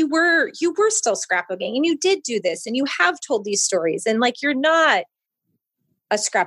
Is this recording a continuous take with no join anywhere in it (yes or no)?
yes